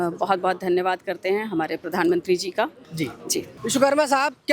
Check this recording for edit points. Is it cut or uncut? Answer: cut